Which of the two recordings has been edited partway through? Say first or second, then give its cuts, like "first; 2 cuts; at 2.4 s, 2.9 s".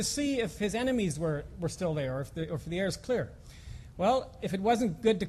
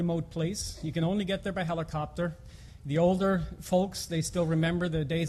second; 1 cut; at 1.8 s